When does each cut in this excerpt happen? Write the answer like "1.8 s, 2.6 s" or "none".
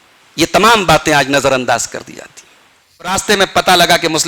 3.1 s